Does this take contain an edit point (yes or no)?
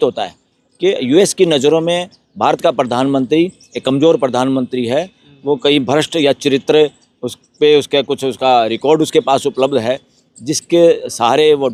no